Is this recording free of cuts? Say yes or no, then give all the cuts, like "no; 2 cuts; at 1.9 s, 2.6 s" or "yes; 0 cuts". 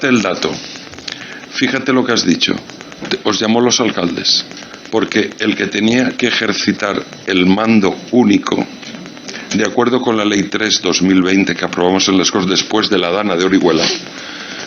yes; 0 cuts